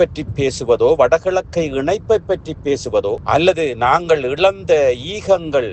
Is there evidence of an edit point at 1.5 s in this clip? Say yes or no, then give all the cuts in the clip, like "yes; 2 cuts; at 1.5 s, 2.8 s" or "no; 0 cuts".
no; 0 cuts